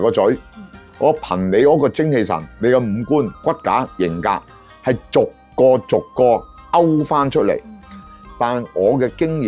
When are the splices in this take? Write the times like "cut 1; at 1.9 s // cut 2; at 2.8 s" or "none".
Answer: cut 1; at 8.0 s